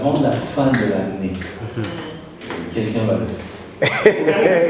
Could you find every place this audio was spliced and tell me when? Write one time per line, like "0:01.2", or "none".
none